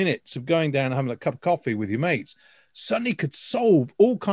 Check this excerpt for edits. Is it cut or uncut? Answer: uncut